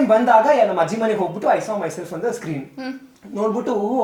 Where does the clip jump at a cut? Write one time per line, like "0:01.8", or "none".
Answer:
none